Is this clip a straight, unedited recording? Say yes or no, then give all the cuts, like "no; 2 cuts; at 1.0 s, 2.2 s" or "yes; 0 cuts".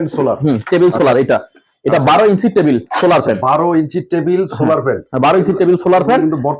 yes; 0 cuts